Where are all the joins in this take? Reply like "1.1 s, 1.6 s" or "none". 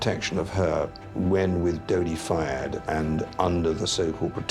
1.0 s